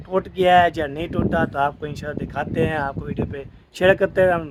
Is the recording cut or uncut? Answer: uncut